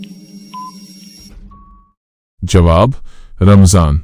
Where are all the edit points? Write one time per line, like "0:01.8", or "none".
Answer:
0:02.0